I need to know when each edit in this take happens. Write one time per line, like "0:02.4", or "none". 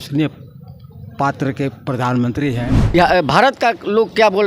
0:02.9